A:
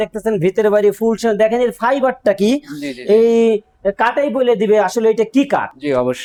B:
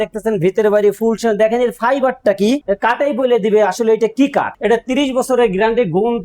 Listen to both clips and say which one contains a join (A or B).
B